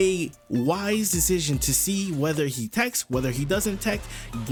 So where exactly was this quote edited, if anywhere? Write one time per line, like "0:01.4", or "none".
none